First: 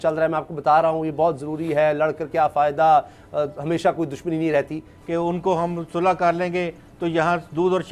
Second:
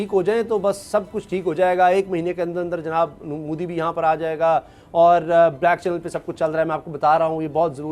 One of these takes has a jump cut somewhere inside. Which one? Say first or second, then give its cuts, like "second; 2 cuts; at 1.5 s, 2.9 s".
first; 1 cut; at 4.9 s